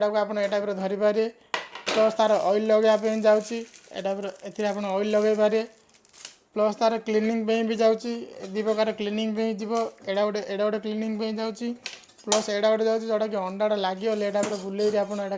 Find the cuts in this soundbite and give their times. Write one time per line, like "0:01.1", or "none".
none